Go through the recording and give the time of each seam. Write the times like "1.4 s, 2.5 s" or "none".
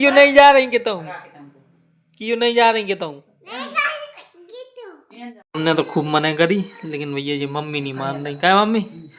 5.3 s